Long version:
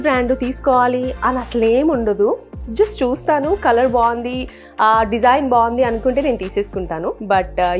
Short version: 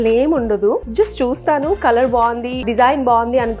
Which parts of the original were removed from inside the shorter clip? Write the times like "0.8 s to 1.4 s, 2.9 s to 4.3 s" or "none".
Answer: 2.4 s to 2.7 s, 4.5 s to 5.1 s